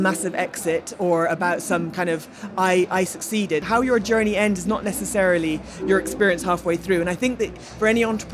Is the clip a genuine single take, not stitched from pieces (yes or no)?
no